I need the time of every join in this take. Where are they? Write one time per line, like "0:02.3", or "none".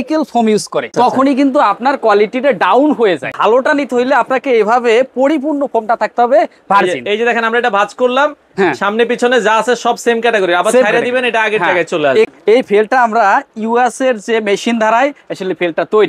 0:00.9
0:03.3
0:12.3